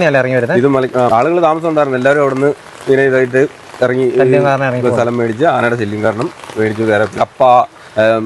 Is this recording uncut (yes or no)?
no